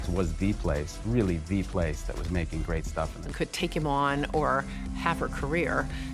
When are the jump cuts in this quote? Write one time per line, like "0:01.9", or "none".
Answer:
none